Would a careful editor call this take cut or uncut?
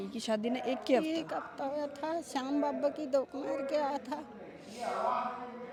uncut